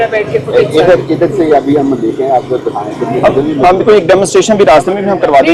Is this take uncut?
yes; 0 cuts

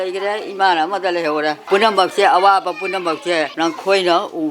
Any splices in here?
yes; 2 cuts; at 1.6 s, 3.5 s

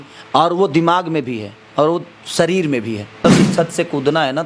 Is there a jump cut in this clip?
yes; 1 cut; at 3.2 s

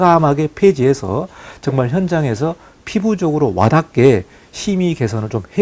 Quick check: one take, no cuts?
yes; 0 cuts

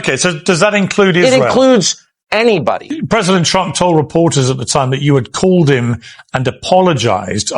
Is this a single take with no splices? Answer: no; 1 cut; at 2.9 s

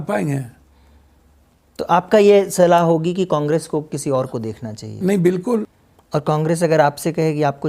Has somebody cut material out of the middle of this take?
yes; 1 cut; at 5.7 s

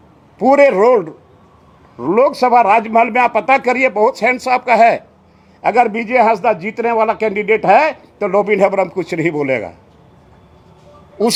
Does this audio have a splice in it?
no; 0 cuts

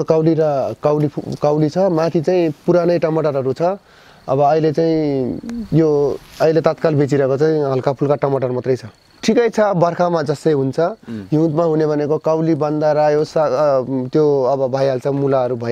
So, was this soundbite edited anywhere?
yes; 1 cut; at 9.1 s

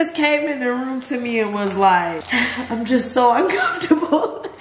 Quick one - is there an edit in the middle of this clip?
yes; 1 cut; at 2.2 s

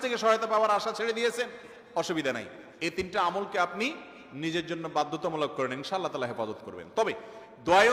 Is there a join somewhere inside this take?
no; 0 cuts

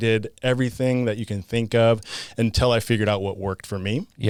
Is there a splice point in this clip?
no; 0 cuts

